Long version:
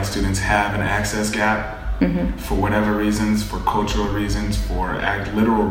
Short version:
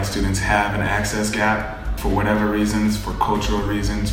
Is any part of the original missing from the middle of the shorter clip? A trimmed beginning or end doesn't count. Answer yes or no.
yes